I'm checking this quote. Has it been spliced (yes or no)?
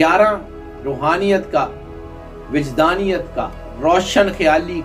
no